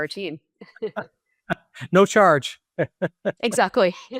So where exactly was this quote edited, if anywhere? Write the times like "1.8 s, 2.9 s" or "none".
none

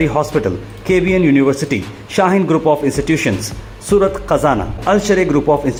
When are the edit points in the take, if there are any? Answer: none

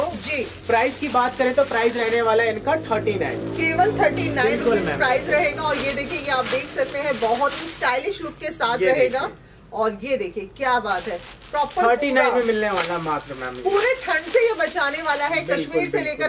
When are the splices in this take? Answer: none

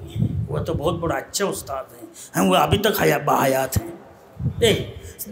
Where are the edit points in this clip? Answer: none

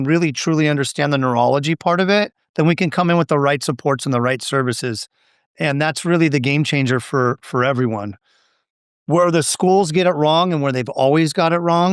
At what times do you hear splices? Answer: none

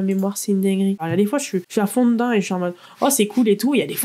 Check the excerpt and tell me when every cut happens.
1.0 s

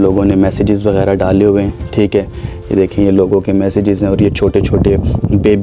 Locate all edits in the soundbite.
none

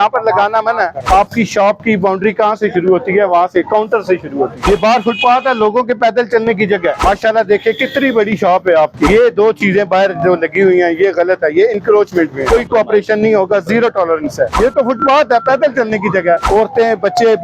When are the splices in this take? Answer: 1.0 s, 4.6 s, 7.0 s, 9.1 s, 12.4 s, 14.5 s, 16.4 s

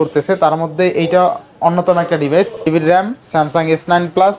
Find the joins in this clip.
2.6 s

